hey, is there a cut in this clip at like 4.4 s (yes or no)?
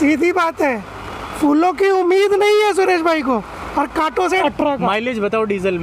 yes